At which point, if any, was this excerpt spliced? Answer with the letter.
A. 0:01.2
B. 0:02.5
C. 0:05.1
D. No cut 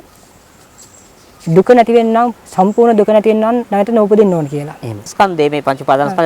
C